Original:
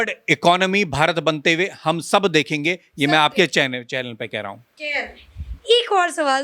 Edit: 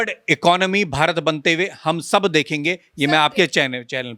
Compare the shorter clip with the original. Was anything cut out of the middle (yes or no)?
no